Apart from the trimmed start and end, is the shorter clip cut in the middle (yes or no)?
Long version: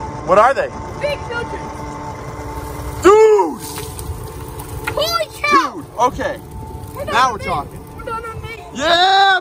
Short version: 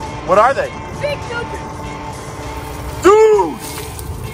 no